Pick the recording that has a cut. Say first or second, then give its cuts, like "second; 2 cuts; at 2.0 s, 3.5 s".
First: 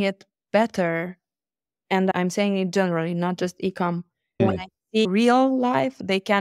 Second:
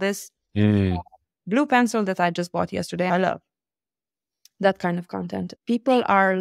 second; 2 cuts; at 3.1 s, 5.6 s